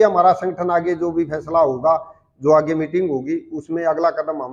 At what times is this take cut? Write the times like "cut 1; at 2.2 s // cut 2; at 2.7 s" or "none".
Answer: none